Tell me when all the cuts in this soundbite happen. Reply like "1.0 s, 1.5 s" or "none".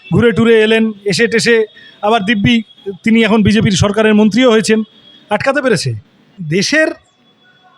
6.3 s